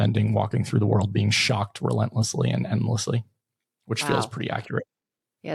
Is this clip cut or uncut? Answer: uncut